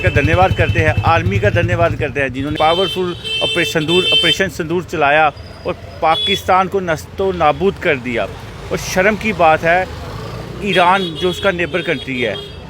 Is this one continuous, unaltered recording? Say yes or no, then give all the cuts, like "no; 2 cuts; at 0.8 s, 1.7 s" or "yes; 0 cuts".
no; 1 cut; at 2.5 s